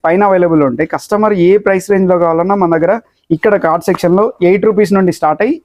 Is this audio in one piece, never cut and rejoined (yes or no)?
yes